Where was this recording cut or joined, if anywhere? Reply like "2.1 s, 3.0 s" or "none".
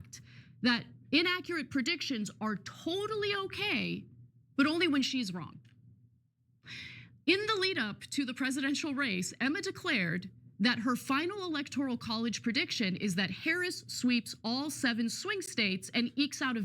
15.5 s